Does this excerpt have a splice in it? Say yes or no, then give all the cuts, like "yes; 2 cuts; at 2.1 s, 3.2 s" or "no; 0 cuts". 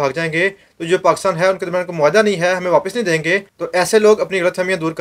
yes; 1 cut; at 3.5 s